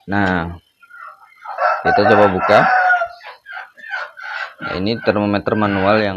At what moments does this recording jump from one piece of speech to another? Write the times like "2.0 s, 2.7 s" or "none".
none